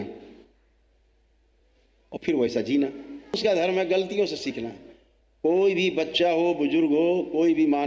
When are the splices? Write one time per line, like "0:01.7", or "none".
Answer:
0:03.4